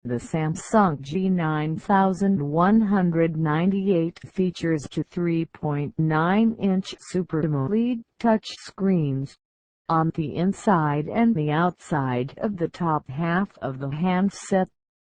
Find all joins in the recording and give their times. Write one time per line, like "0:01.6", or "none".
none

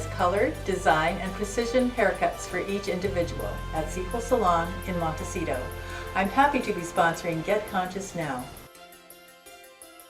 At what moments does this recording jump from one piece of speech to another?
0:08.6

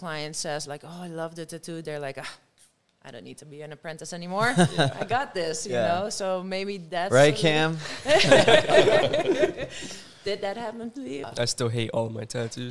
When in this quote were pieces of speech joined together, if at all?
0:11.2

